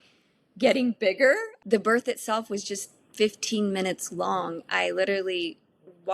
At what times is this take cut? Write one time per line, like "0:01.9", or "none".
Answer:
0:01.5